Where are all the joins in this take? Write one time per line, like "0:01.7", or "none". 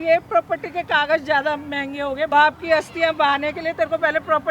0:02.3